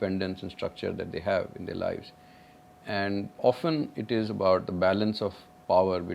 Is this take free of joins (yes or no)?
no